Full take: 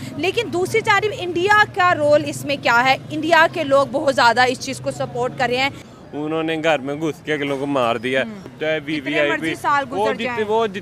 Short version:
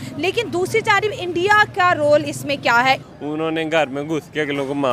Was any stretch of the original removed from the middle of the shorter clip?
yes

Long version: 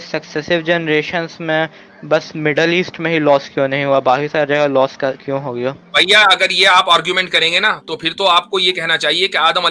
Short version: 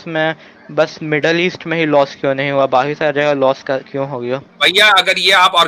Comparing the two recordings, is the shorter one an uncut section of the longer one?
yes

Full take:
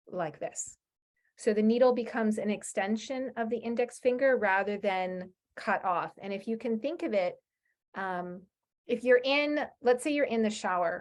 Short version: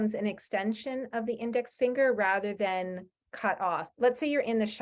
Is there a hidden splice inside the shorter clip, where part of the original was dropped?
yes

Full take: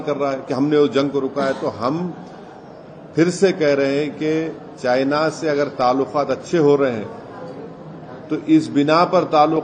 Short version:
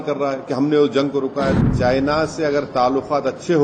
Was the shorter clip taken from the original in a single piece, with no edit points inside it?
no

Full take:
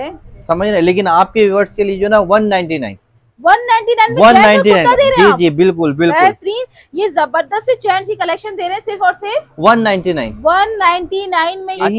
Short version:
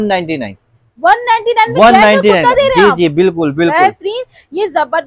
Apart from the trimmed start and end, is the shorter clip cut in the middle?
no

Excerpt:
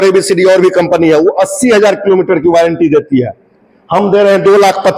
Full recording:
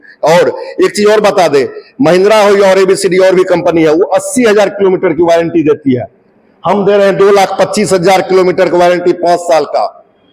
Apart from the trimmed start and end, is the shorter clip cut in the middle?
no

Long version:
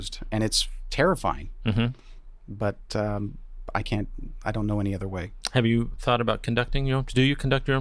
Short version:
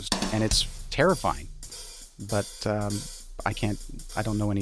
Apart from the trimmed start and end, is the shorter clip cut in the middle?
yes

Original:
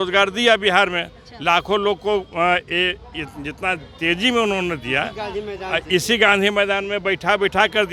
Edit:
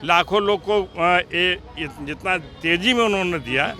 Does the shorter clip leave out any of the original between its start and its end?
no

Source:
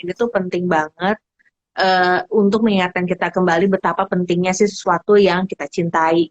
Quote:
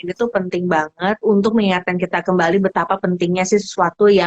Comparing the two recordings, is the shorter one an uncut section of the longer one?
no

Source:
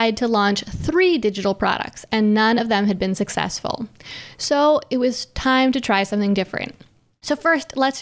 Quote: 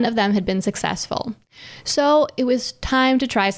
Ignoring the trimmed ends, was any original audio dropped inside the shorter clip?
no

